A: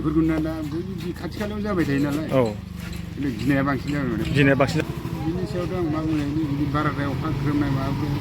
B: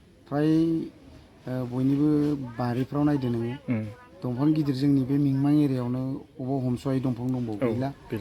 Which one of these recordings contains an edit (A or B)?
A